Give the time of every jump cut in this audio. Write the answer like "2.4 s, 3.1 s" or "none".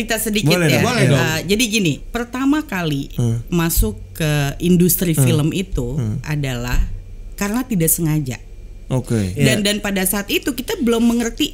2.1 s, 9.4 s